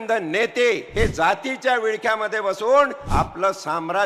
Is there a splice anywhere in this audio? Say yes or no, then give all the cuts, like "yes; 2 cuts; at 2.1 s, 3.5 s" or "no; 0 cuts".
yes; 2 cuts; at 0.9 s, 3.0 s